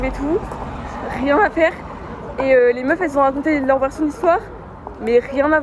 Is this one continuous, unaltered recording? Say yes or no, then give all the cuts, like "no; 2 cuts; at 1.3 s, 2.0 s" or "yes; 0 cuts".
yes; 0 cuts